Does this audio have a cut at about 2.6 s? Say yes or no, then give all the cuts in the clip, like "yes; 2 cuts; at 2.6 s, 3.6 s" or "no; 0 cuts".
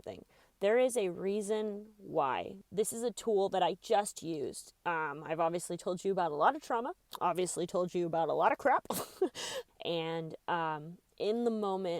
yes; 2 cuts; at 2.6 s, 9.5 s